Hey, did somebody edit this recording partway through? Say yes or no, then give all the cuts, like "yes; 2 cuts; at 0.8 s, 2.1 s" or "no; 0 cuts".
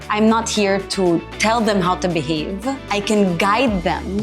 yes; 2 cuts; at 1.3 s, 2.8 s